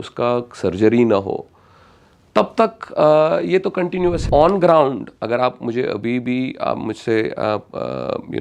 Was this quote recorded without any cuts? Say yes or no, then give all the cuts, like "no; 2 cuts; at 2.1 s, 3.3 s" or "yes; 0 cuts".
no; 1 cut; at 4.2 s